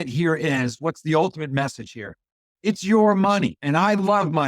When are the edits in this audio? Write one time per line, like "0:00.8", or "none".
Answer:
0:03.6